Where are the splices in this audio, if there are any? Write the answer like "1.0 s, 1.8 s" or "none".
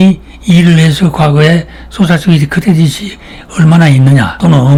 none